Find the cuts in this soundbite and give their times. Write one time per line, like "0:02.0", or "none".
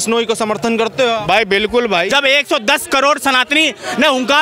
0:02.1

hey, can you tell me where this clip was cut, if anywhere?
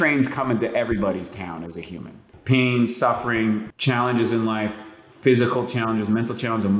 0:02.3
0:03.7

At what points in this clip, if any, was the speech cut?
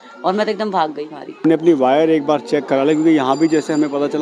0:01.4

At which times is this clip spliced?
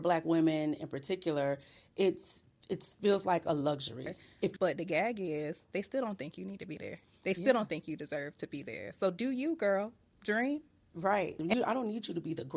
0:04.5
0:11.4

